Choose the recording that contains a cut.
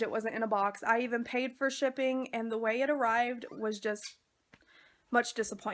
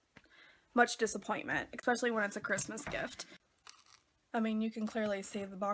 second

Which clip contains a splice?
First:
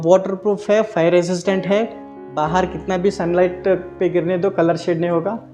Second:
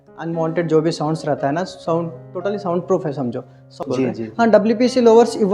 second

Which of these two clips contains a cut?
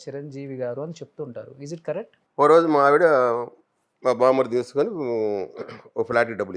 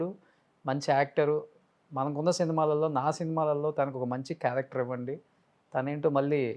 first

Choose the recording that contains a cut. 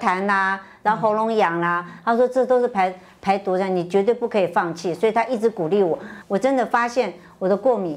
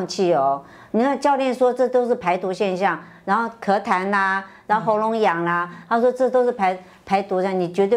first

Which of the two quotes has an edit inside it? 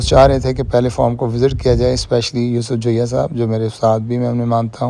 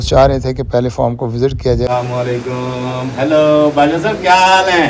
second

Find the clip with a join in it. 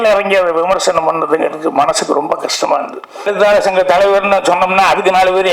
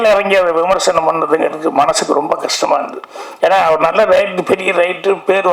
first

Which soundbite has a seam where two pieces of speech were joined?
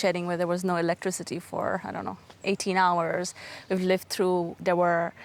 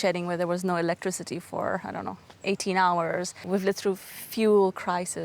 second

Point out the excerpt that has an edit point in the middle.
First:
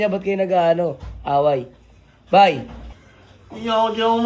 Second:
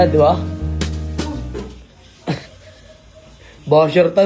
first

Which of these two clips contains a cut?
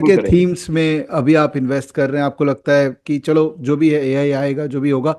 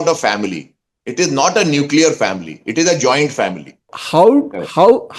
second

